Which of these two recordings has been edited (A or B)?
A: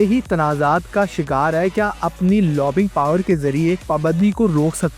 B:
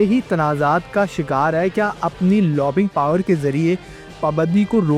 A